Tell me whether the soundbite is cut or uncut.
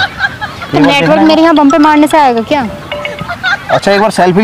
uncut